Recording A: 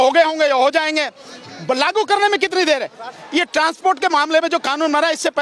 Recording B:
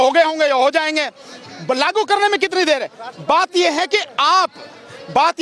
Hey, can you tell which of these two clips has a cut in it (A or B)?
A